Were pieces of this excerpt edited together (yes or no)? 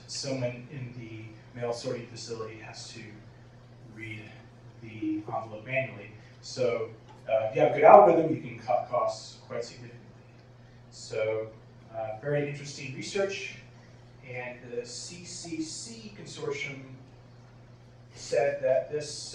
yes